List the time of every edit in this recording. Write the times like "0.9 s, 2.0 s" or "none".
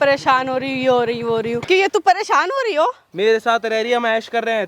1.6 s, 3.0 s